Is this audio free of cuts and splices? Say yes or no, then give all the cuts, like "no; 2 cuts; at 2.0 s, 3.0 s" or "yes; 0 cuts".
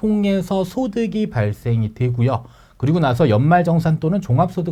yes; 0 cuts